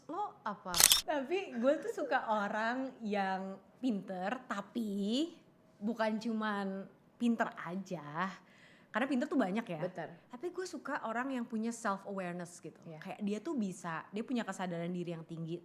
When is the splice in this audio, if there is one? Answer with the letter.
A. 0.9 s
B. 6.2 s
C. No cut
A